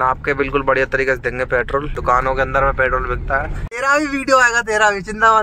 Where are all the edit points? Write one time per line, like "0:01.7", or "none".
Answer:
0:01.9
0:03.6